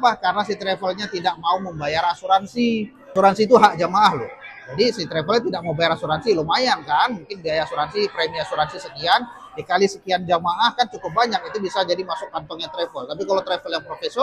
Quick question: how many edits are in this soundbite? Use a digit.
1